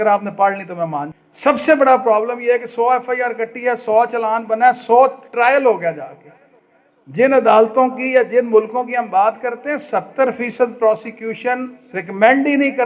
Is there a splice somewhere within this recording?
yes; 1 cut; at 1.2 s

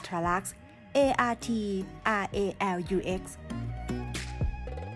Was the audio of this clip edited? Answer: yes; 1 cut; at 3.3 s

